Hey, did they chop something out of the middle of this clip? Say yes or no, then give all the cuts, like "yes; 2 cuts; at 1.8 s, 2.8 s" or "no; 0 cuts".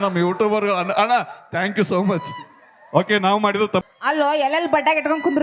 yes; 1 cut; at 3.8 s